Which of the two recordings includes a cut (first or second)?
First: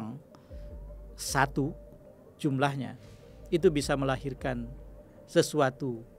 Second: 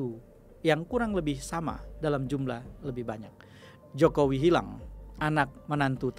second